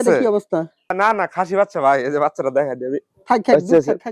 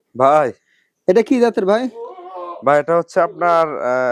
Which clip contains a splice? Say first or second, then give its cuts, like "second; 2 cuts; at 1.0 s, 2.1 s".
first; 1 cut; at 1.0 s